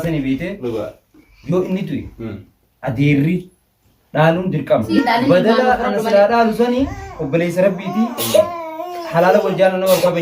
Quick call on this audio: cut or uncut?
cut